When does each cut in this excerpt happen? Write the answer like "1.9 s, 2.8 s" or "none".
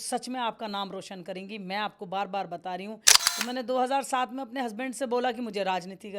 3.1 s